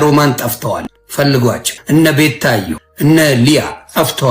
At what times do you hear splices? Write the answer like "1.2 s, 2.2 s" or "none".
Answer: 1.0 s, 1.7 s, 2.8 s